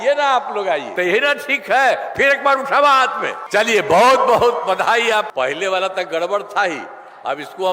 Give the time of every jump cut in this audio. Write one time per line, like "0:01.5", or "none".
0:00.9
0:03.4
0:05.3